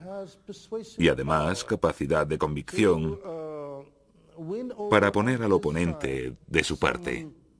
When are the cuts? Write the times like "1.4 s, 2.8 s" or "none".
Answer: 1.4 s